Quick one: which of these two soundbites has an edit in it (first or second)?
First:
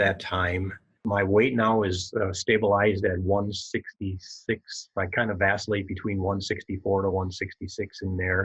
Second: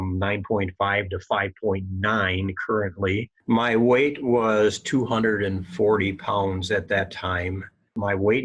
second